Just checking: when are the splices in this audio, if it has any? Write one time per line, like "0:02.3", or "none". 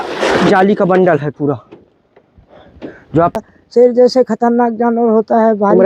0:03.4

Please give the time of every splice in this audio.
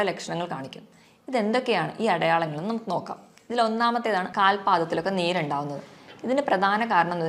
0:04.3

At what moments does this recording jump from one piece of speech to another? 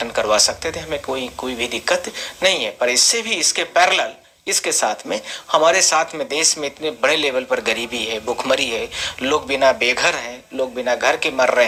none

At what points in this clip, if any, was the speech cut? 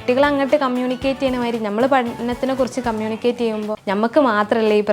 0:03.8

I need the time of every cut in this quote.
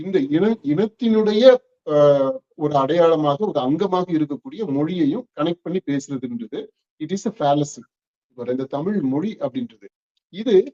0:08.4

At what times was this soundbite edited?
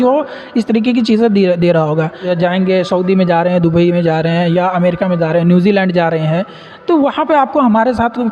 0:02.3

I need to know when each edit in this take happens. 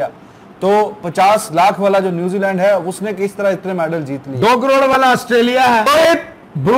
0:05.9

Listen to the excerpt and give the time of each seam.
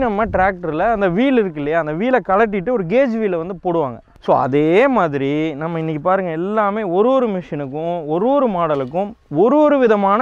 0:04.1

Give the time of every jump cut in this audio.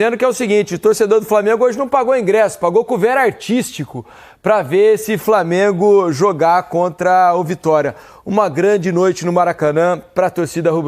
none

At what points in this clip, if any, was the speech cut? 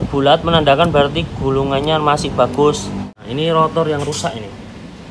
0:03.2

